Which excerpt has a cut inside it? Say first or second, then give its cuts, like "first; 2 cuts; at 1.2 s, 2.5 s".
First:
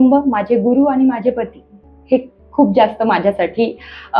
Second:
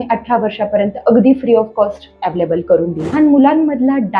second; 1 cut; at 3.1 s